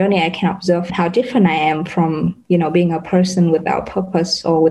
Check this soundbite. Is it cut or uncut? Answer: cut